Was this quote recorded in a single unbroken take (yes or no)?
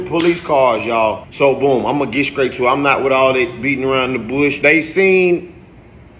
no